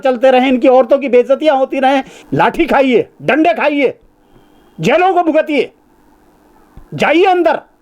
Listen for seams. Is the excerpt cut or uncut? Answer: cut